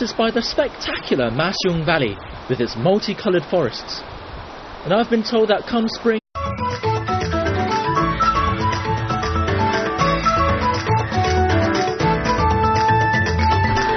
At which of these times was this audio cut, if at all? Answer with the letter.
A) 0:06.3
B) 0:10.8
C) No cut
C